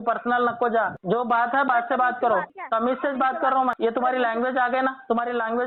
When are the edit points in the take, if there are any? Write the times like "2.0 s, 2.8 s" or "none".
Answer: 1.0 s, 2.6 s, 3.8 s